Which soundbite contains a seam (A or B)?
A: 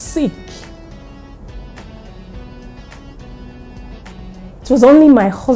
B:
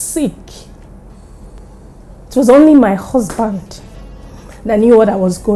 B